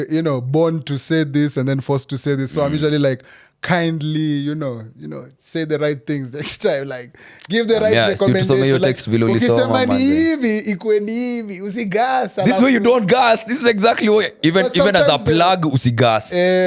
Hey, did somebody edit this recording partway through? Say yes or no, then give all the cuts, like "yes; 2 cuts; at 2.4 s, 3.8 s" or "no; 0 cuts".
no; 0 cuts